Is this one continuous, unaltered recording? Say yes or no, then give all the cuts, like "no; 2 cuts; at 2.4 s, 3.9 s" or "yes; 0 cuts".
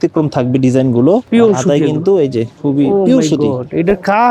no; 2 cuts; at 1.3 s, 2.5 s